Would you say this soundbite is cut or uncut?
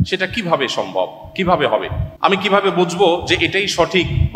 cut